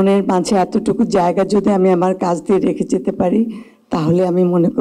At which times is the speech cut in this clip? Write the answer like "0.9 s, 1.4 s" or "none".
none